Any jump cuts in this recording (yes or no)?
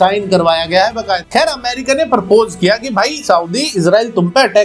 yes